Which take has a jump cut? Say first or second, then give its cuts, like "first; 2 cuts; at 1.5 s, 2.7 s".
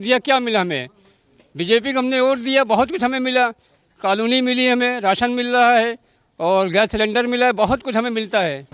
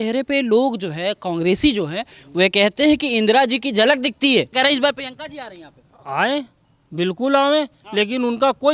second; 1 cut; at 4.5 s